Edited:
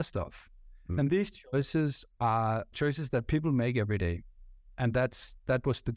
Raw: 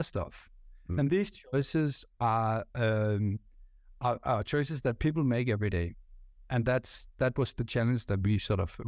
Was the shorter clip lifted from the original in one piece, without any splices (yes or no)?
no